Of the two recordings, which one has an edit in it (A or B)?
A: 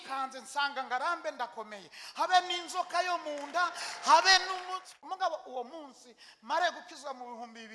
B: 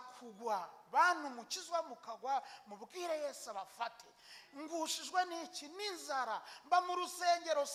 A